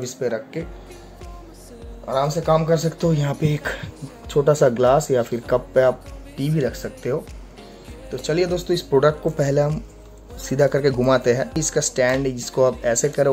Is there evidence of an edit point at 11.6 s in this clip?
yes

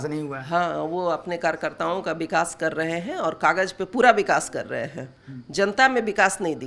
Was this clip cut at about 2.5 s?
no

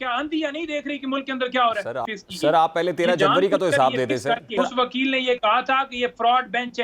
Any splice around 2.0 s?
yes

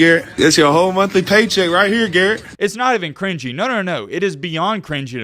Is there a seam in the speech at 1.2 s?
no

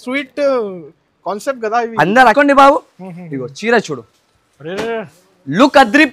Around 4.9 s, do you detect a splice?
no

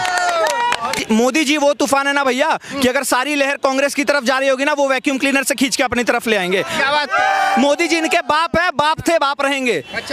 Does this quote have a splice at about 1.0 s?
yes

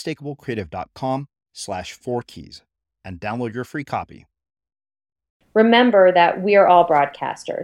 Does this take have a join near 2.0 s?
no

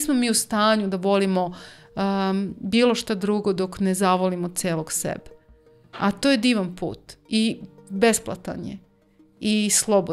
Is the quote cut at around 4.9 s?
no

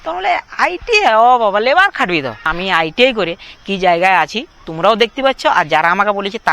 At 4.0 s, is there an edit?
no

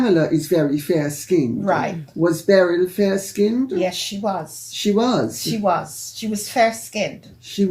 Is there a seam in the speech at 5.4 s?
no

